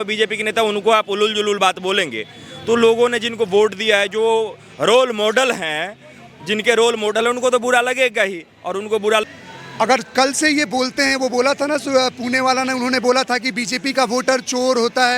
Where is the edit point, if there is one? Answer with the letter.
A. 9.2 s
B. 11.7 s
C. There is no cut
A